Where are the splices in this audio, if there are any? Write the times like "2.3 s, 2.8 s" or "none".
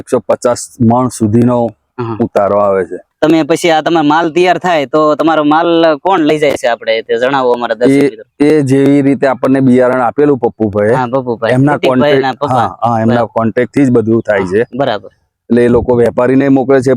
3.0 s